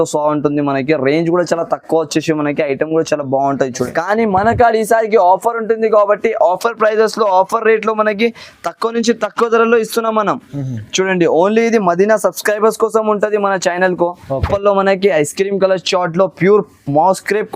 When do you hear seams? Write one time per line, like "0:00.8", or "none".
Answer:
0:03.8
0:14.4

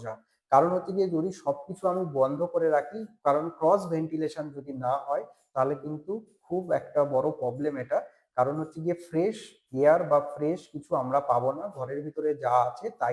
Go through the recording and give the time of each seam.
none

